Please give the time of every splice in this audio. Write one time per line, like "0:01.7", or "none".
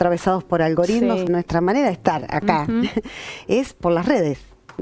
0:01.3